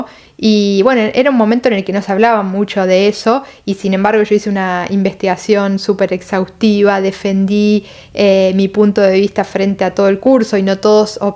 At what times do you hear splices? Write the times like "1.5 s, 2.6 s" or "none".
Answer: none